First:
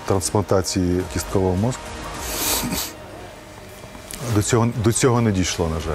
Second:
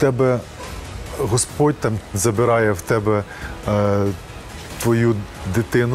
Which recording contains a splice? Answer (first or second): first